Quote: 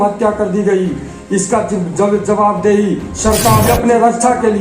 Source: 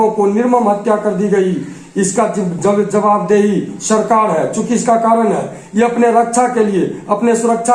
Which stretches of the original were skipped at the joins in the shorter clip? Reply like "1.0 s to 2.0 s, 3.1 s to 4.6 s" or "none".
4.3 s to 5.8 s